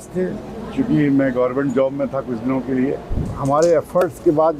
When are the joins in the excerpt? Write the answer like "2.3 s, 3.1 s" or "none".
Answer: 3.3 s